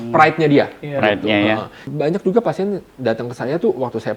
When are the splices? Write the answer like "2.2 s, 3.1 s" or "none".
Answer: 1.8 s